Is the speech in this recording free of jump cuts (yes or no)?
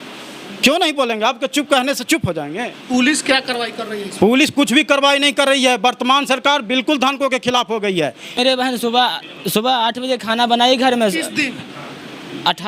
no